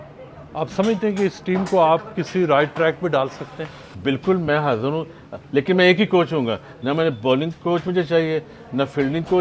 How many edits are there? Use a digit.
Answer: 1